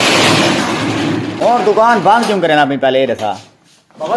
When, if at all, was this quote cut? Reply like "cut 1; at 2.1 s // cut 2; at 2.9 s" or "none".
cut 1; at 1.5 s